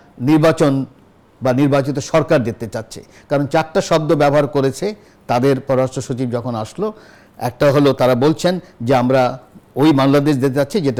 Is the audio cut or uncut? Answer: uncut